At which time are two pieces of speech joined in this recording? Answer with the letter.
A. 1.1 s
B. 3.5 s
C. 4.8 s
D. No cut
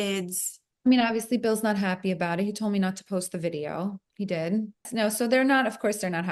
C